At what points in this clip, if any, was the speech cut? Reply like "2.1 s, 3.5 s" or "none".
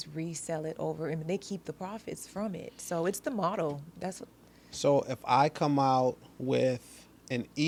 none